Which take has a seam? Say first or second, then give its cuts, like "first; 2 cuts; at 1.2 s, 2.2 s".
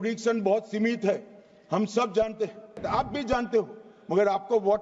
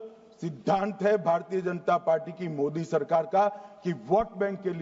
first; 1 cut; at 2.8 s